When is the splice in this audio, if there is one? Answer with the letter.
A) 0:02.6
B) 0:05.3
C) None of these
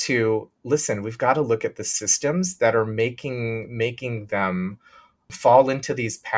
C